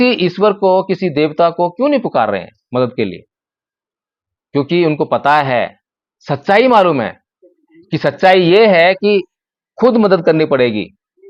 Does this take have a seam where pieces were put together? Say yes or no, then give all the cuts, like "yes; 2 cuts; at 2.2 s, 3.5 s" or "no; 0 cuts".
no; 0 cuts